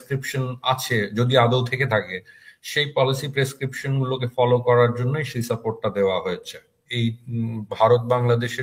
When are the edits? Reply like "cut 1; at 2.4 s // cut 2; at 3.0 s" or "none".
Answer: cut 1; at 6.9 s